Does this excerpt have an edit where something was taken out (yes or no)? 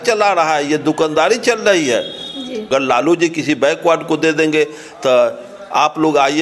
yes